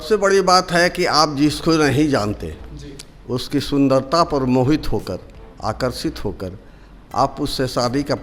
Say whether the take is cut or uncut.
uncut